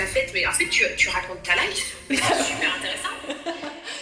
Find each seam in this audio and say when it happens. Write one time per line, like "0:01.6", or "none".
none